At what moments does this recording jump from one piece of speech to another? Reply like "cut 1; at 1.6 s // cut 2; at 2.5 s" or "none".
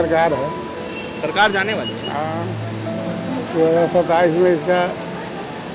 none